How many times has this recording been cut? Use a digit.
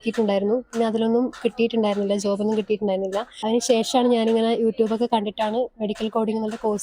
1